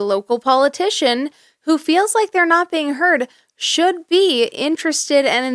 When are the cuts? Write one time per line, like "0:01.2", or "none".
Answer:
none